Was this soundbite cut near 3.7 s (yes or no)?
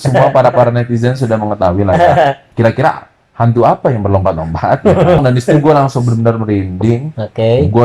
no